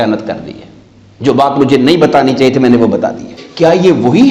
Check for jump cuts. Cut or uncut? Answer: cut